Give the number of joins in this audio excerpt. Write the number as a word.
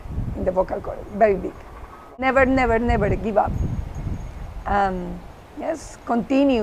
one